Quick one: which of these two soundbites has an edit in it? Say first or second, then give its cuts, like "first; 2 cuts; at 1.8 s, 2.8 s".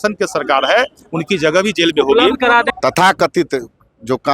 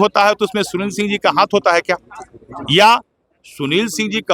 first; 1 cut; at 2.7 s